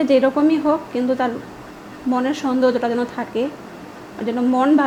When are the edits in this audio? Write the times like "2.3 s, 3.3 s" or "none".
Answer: none